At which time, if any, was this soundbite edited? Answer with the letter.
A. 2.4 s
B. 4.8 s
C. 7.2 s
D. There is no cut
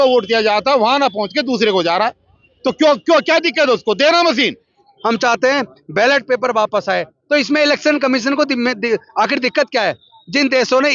B